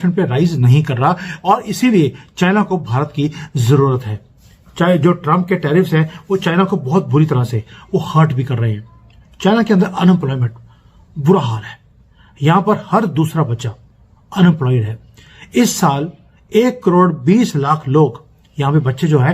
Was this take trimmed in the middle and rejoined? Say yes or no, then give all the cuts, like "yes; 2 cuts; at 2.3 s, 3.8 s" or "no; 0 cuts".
no; 0 cuts